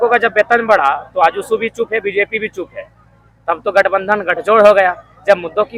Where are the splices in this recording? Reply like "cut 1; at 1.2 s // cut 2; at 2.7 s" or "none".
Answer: none